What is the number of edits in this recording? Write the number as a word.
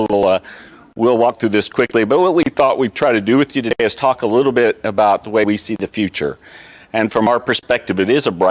one